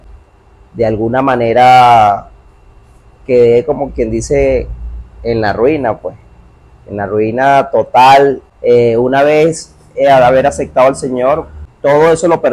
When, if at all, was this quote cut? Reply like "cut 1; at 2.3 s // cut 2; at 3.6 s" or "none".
cut 1; at 8.5 s // cut 2; at 11.6 s